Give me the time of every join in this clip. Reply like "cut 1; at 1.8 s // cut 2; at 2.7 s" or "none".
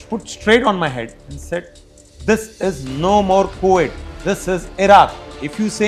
none